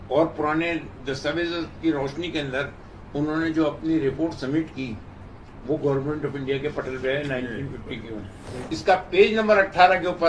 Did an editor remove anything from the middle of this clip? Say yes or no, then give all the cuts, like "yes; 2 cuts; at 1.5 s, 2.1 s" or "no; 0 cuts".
yes; 1 cut; at 8.5 s